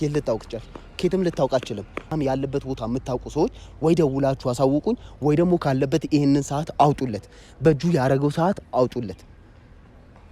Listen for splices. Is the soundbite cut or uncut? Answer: cut